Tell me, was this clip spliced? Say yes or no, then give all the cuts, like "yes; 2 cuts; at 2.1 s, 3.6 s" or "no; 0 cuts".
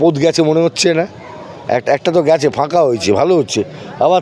no; 0 cuts